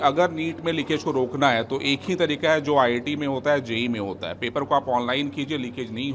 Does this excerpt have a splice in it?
no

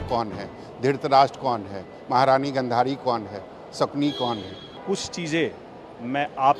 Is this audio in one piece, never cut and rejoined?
no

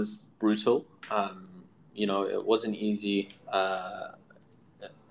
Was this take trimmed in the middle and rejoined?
no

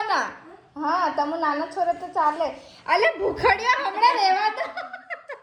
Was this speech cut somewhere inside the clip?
no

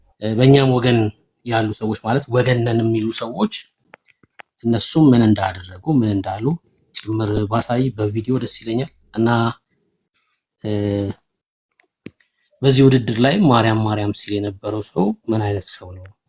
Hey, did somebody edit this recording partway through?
no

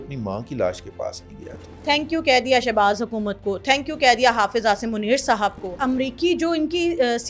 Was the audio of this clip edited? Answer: yes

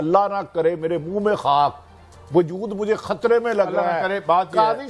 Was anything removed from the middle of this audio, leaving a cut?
no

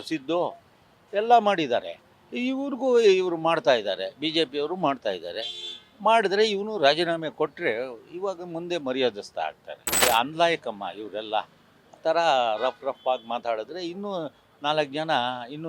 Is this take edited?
yes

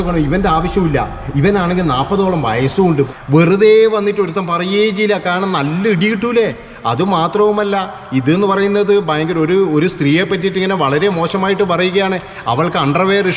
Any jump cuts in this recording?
yes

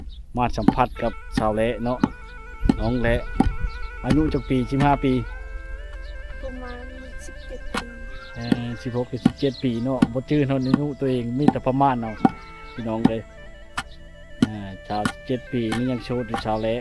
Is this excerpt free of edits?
yes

